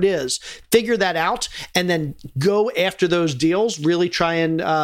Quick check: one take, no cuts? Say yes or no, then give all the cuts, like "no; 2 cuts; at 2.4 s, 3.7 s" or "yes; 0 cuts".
yes; 0 cuts